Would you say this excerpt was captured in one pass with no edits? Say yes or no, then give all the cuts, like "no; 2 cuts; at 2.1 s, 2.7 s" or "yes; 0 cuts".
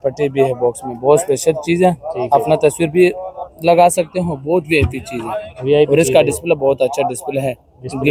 yes; 0 cuts